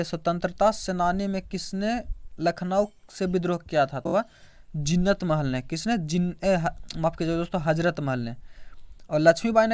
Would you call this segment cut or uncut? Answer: uncut